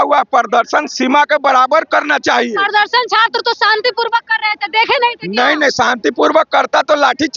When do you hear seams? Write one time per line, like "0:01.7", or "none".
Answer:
none